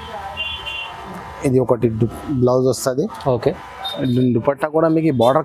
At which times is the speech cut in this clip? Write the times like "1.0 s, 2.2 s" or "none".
none